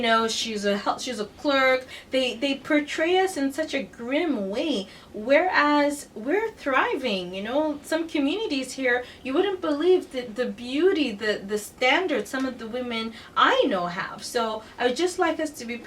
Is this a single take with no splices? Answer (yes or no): no